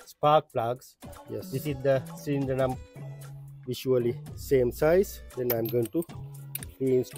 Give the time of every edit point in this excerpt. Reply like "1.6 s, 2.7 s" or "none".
2.7 s